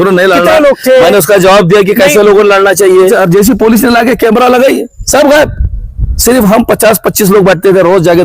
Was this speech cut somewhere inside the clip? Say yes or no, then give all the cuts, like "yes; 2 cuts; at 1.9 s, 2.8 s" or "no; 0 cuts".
yes; 1 cut; at 3.1 s